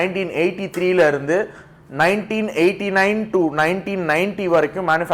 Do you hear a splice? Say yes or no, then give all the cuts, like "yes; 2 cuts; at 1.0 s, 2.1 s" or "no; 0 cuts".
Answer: no; 0 cuts